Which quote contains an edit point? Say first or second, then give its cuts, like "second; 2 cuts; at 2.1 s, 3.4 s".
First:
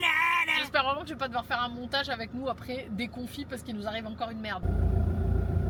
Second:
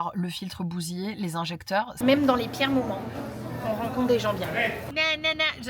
second; 2 cuts; at 2.0 s, 4.8 s